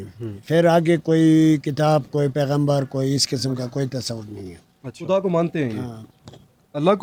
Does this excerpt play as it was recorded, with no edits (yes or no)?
yes